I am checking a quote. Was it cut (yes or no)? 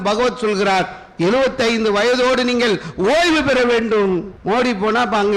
yes